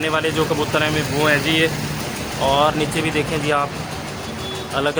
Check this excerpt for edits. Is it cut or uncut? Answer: uncut